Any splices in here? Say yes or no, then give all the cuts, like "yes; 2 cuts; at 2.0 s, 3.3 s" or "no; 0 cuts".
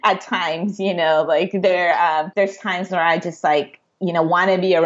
yes; 1 cut; at 2.3 s